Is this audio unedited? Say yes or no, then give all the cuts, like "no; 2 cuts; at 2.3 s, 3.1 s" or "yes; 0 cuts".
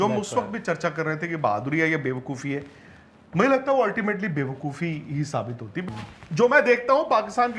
no; 1 cut; at 5.9 s